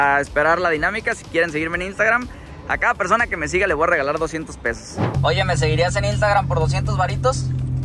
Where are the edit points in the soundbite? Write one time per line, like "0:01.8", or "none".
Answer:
0:05.1